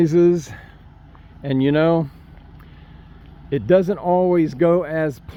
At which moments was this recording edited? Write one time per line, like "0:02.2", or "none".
none